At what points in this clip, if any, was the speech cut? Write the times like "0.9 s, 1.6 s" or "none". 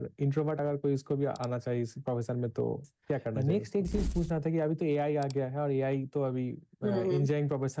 3.4 s